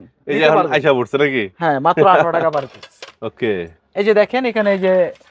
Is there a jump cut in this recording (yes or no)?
no